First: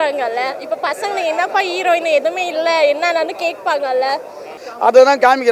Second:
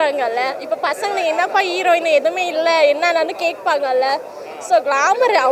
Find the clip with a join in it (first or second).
first